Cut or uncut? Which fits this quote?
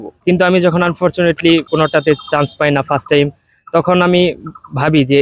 cut